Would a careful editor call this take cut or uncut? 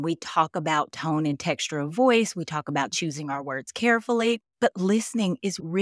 cut